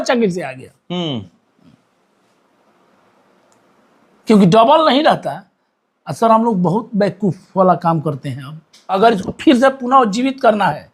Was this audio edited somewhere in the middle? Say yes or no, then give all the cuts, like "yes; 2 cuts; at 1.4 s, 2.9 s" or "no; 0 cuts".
yes; 1 cut; at 9.0 s